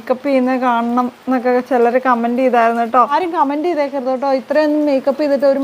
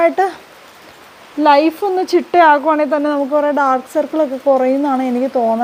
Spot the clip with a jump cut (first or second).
first